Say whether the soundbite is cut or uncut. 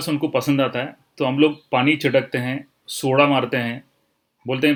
uncut